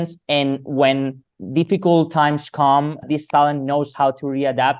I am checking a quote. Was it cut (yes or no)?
yes